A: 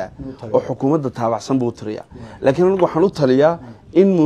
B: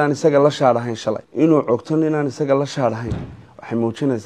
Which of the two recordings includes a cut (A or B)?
B